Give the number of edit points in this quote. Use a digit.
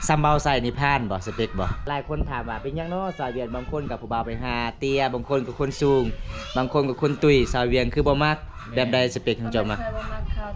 1